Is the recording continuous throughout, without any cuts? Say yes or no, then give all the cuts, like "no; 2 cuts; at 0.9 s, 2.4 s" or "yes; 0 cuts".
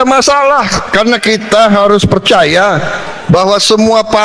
yes; 0 cuts